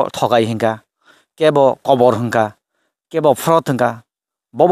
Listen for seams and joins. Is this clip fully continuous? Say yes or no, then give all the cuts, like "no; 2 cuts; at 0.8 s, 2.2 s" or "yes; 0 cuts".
yes; 0 cuts